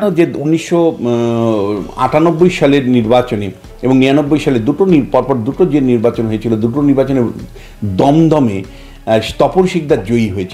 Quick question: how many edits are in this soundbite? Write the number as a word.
zero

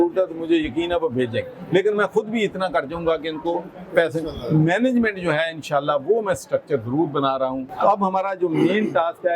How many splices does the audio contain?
one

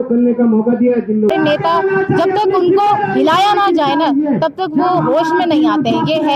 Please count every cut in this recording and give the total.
one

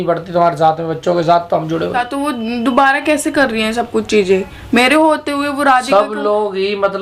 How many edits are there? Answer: one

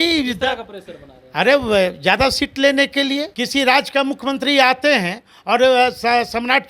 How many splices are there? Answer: one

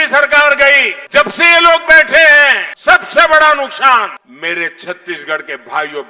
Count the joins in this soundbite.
three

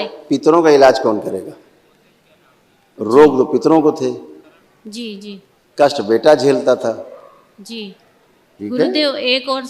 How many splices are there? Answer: one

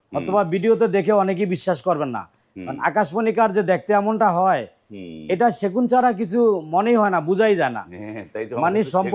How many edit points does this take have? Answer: zero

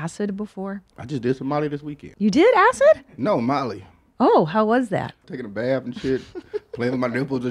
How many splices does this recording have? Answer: three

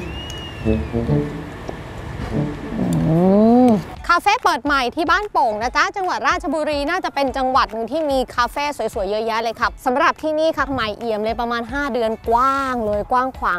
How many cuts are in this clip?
two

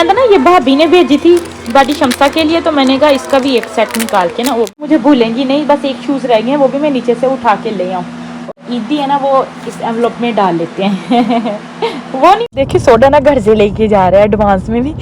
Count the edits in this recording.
three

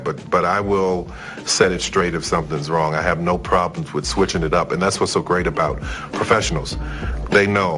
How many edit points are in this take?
zero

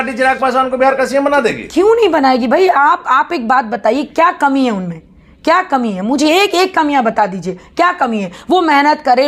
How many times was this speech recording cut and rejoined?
zero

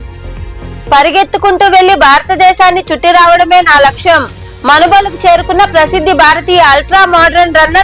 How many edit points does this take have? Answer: one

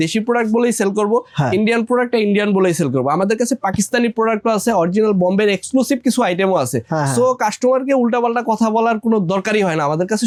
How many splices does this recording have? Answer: zero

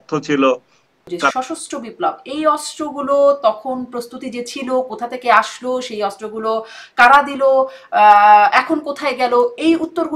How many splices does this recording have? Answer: one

